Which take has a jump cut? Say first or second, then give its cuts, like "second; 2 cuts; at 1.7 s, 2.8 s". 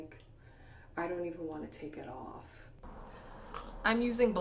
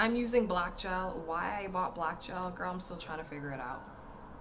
first; 1 cut; at 2.8 s